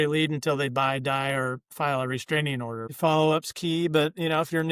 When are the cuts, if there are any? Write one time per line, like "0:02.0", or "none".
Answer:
0:02.9